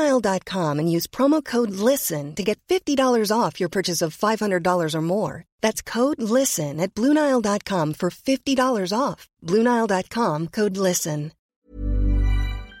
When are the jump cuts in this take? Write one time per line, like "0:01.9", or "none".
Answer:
0:11.5